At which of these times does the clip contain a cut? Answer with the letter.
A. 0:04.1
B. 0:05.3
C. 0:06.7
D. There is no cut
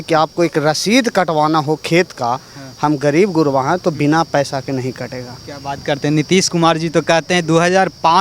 D